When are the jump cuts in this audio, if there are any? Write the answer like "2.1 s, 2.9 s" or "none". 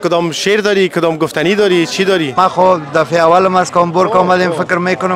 2.3 s

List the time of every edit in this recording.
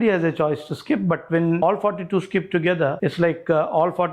1.6 s, 3.0 s

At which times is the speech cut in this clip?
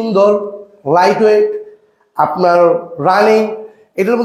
none

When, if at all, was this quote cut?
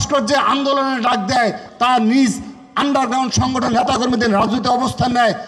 1.7 s

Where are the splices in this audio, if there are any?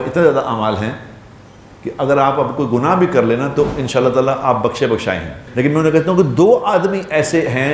5.4 s

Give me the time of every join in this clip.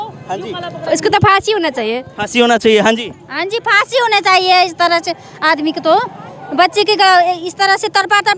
none

